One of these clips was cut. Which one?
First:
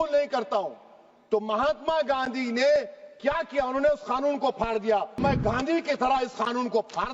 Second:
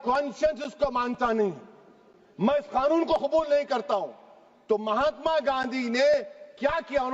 first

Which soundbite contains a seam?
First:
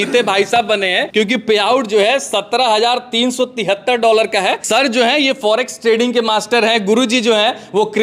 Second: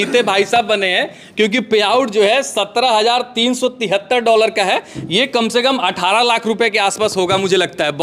first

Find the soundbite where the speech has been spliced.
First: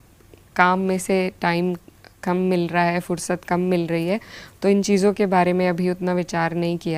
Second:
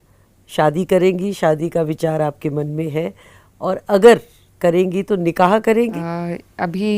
second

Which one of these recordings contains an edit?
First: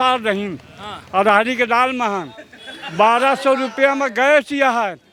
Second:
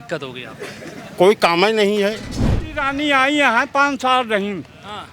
second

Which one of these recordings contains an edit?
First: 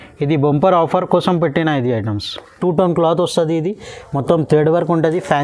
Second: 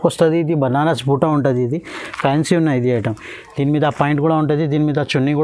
first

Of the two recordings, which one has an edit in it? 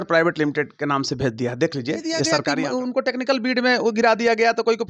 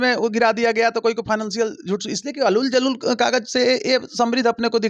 first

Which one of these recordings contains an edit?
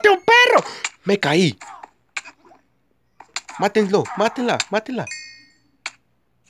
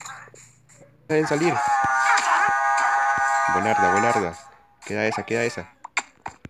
second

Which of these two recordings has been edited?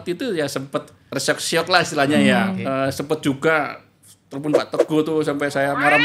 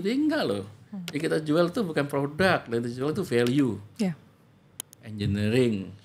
first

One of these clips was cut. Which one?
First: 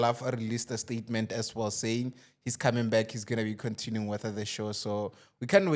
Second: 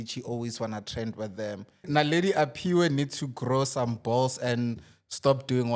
second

